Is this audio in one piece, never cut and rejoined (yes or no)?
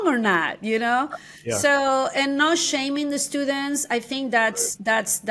yes